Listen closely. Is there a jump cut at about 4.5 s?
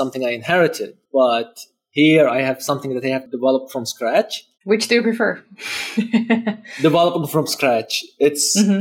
no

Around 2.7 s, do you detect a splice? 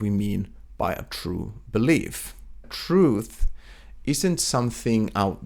yes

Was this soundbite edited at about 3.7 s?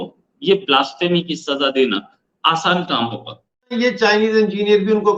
yes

